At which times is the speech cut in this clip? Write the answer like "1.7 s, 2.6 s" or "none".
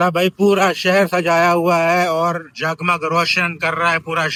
none